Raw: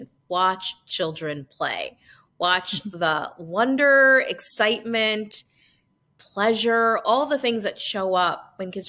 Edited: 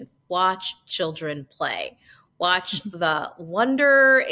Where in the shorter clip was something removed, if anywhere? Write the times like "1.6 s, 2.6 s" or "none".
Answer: none